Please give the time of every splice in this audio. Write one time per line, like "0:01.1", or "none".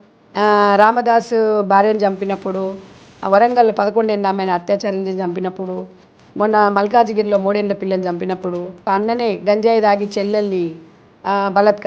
0:08.9